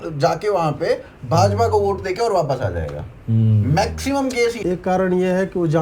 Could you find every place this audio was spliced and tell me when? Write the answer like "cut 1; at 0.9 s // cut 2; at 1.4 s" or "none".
cut 1; at 4.6 s